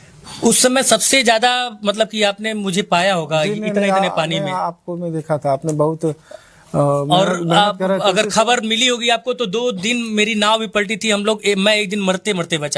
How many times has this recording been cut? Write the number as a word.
zero